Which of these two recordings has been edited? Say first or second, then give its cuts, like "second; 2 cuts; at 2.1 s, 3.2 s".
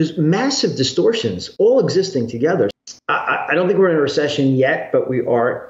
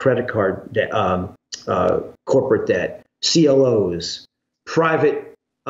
first; 1 cut; at 2.7 s